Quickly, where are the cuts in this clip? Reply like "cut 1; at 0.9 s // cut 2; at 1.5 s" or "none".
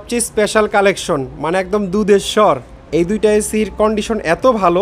cut 1; at 2.7 s